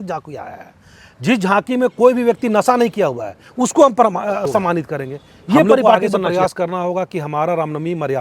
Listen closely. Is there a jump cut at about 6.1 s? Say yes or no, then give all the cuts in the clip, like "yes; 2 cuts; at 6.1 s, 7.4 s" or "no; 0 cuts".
yes; 1 cut; at 6.1 s